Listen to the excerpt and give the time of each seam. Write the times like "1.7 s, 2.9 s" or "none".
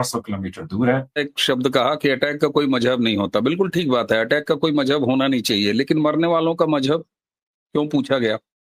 1.3 s